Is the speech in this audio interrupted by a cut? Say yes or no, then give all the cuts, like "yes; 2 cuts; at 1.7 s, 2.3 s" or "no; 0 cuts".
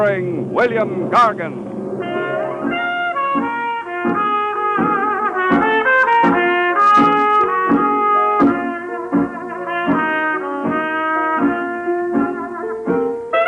no; 0 cuts